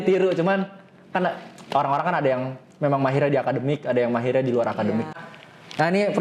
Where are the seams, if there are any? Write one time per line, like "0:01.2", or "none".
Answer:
0:05.1